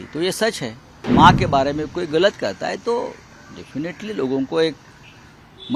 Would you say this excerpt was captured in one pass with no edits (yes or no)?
no